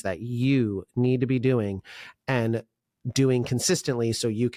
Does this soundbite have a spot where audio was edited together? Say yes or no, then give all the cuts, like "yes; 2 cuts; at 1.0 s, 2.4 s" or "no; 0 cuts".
no; 0 cuts